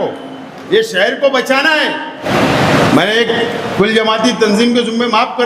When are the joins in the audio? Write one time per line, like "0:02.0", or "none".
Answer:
0:02.3

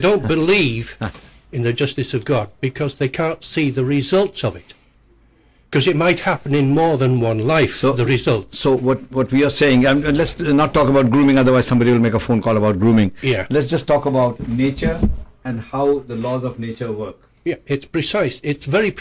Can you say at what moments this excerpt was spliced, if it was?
none

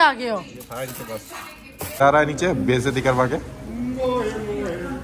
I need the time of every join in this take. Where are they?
0:02.0

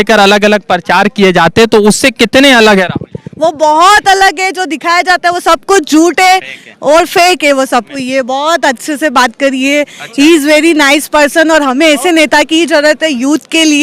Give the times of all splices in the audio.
0:07.9

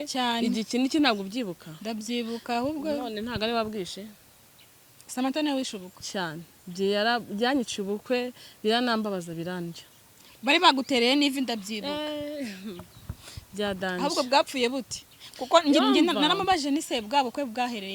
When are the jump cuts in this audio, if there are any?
none

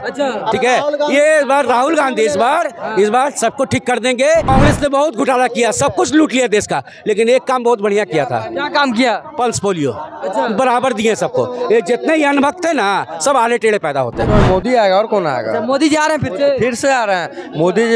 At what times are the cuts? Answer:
0:04.5
0:14.3

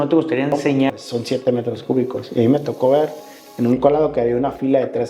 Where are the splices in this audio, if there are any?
0:00.9

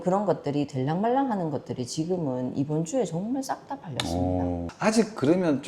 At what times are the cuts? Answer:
0:04.7

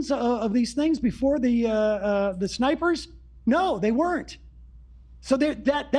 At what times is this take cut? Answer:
none

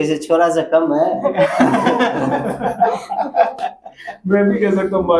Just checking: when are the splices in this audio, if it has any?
none

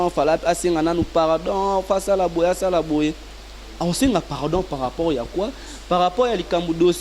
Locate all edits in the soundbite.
none

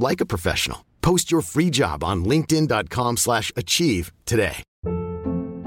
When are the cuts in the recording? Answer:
0:04.7

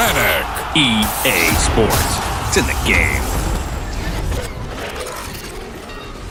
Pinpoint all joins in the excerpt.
none

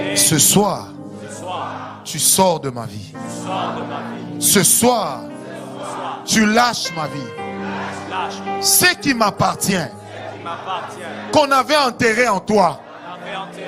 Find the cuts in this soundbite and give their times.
none

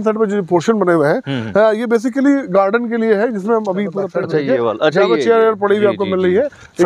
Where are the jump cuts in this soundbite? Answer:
0:04.0

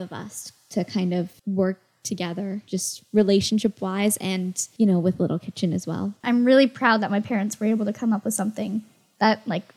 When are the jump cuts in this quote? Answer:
0:01.3
0:02.6
0:04.6
0:06.2

